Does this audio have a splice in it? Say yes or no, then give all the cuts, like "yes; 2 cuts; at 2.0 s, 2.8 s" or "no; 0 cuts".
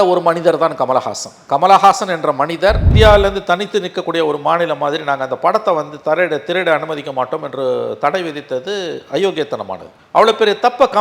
yes; 1 cut; at 2.9 s